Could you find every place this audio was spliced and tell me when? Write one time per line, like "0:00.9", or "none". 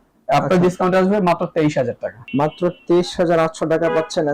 0:02.2